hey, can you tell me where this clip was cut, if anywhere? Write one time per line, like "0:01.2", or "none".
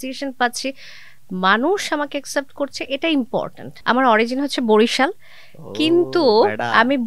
0:03.6